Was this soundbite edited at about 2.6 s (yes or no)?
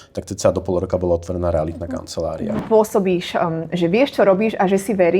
yes